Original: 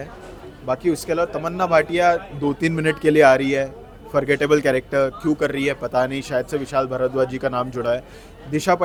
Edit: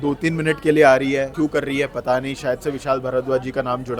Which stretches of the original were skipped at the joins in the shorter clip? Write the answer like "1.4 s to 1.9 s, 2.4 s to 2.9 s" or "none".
3.7 s to 5.2 s